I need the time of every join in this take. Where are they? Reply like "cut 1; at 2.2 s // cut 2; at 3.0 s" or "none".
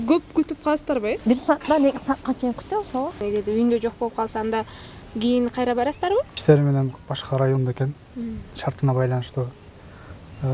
cut 1; at 1.2 s // cut 2; at 3.2 s // cut 3; at 6.3 s